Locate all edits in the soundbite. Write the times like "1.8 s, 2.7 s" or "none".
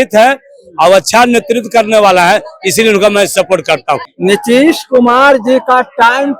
4.1 s